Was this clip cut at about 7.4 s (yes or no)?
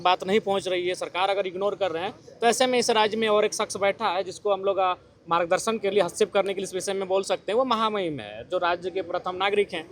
no